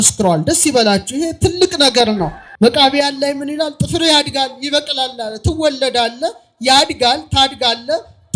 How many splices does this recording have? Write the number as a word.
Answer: one